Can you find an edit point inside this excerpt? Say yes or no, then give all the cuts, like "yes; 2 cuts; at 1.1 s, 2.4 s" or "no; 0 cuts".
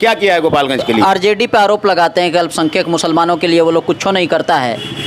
yes; 1 cut; at 1.0 s